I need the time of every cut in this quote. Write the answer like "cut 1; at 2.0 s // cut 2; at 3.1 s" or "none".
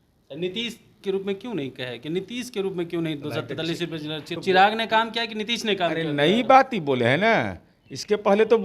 cut 1; at 4.3 s

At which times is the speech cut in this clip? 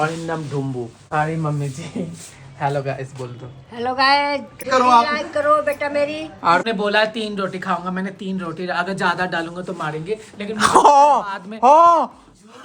cut 1; at 1.0 s // cut 2; at 4.6 s // cut 3; at 6.6 s

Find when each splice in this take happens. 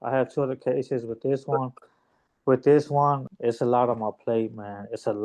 cut 1; at 3.2 s

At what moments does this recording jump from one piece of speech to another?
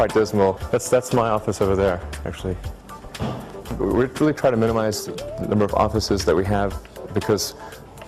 cut 1; at 7.1 s

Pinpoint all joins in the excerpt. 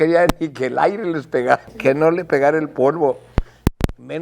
cut 1; at 1.7 s

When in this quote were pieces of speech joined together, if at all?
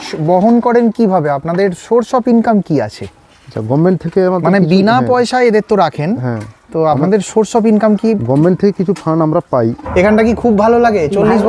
cut 1; at 9.8 s

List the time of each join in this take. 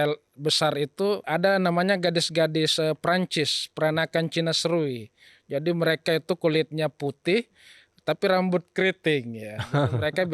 cut 1; at 1.2 s

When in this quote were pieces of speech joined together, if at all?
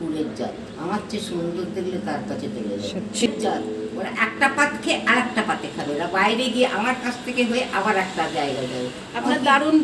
cut 1; at 3.3 s

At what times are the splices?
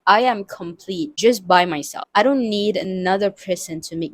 none

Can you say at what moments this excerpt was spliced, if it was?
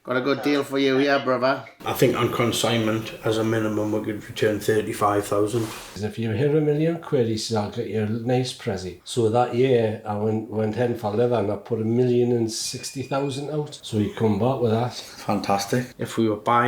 cut 1; at 1.8 s // cut 2; at 5.9 s // cut 3; at 9.0 s // cut 4; at 15.9 s

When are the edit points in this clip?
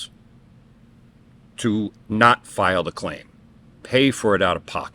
cut 1; at 1.9 s

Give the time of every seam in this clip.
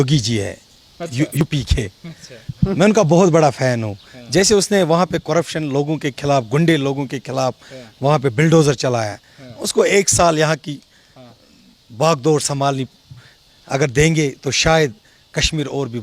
cut 1; at 1.4 s

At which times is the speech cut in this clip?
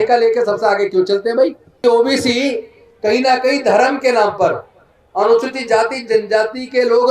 cut 1; at 1.8 s

